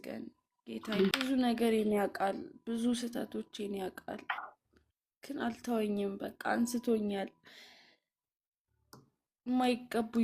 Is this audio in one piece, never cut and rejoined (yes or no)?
no